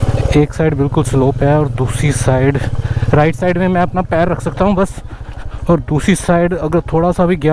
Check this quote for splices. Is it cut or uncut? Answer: uncut